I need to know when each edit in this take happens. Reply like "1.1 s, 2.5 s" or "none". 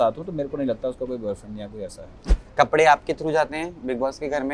2.1 s